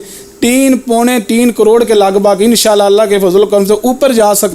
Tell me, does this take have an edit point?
no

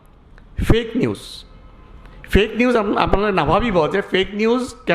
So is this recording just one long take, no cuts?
yes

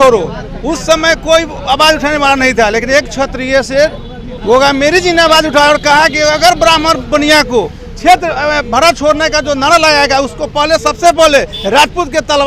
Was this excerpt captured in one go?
yes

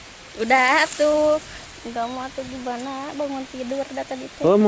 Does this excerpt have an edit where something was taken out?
no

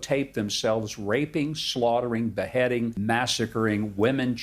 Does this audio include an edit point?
yes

